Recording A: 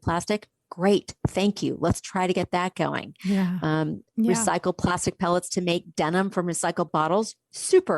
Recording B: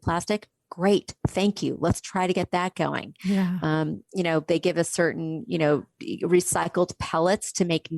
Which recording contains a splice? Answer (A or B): A